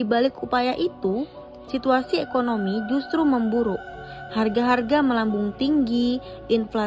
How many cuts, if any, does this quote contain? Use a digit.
0